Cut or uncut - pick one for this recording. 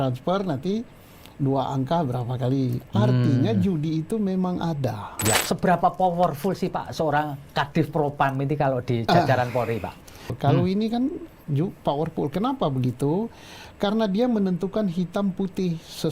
cut